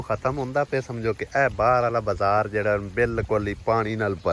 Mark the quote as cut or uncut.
uncut